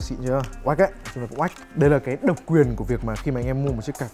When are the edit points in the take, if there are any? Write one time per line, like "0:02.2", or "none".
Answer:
0:01.6